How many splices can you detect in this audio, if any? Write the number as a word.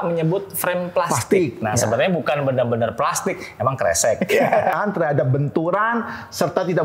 one